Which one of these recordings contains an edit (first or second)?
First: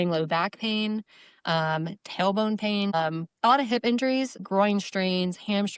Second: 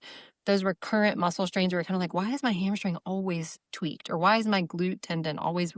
first